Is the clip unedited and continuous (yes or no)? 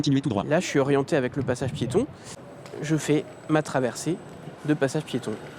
no